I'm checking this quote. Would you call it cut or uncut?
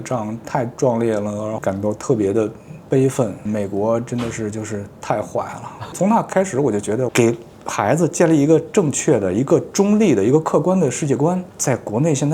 cut